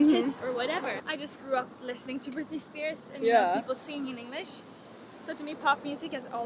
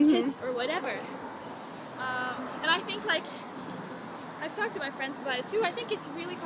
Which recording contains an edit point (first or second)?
first